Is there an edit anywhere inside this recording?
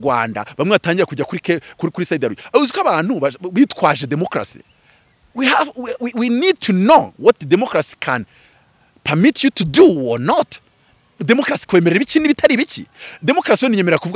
no; 0 cuts

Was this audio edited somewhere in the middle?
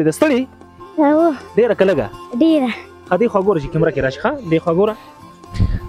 no; 0 cuts

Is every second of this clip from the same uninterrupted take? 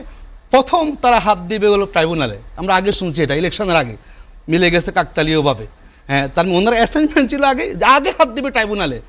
yes; 0 cuts

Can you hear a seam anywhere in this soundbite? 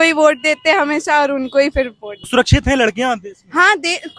yes; 1 cut; at 2.2 s

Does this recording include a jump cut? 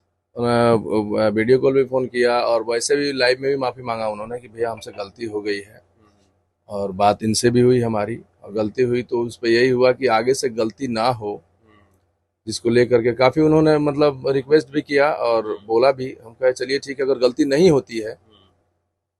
no; 0 cuts

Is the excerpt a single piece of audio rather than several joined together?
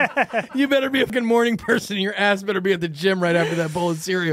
no; 1 cut; at 1.1 s

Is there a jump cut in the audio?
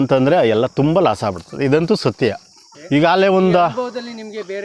no; 0 cuts

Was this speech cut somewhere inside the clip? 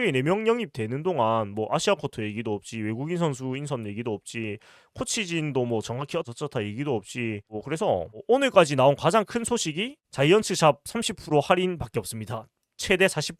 no; 0 cuts

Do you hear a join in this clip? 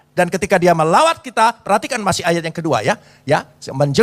no; 0 cuts

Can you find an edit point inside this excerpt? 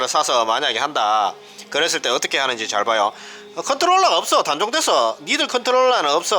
no; 0 cuts

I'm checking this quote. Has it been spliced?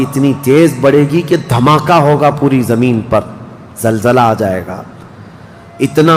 no; 0 cuts

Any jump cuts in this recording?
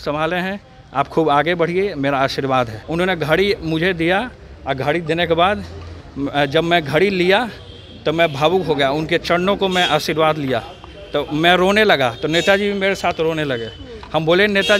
yes; 1 cut; at 2.8 s

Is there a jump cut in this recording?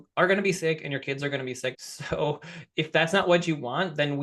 yes; 1 cut; at 1.8 s

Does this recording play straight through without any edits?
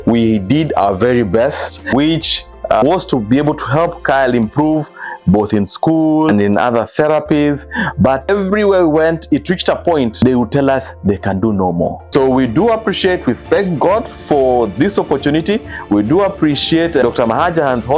no; 2 cuts; at 1.9 s, 12.0 s

